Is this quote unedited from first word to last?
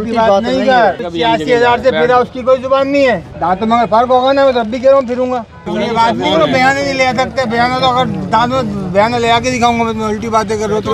no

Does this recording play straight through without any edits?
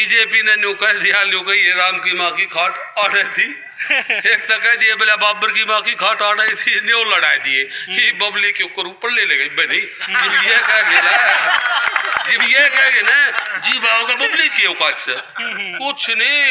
yes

